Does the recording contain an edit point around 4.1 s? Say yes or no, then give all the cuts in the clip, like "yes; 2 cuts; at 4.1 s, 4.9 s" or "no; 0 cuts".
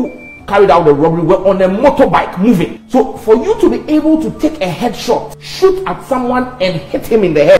no; 2 cuts; at 2.8 s, 5.4 s